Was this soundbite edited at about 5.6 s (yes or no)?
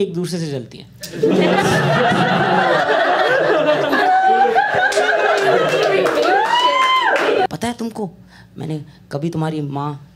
no